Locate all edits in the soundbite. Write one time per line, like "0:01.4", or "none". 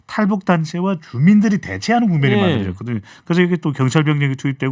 none